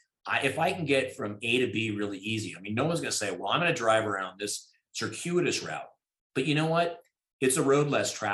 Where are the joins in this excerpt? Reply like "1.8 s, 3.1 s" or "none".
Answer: none